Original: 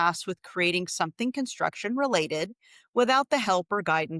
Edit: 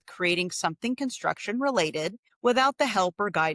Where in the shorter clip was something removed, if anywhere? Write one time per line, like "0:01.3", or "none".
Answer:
0:02.2